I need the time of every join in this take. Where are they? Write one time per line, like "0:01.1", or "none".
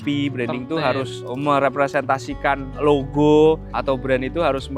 0:01.2
0:02.7
0:03.7